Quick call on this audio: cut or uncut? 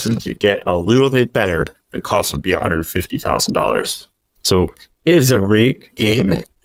uncut